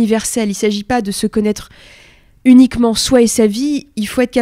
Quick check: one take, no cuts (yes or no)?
yes